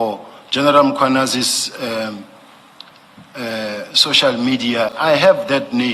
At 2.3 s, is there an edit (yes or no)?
no